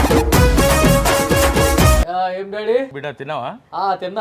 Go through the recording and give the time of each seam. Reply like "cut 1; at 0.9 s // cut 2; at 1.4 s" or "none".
cut 1; at 2.0 s // cut 2; at 2.9 s